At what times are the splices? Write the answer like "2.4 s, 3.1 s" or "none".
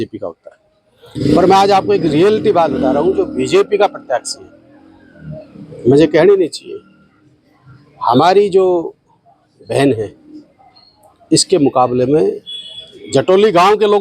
none